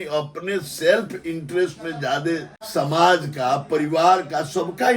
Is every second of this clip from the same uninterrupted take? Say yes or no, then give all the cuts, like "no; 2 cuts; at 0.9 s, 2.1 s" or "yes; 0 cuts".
no; 1 cut; at 2.6 s